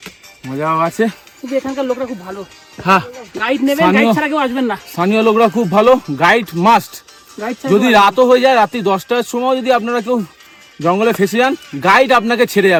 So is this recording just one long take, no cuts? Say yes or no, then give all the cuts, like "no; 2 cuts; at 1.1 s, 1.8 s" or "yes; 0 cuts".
yes; 0 cuts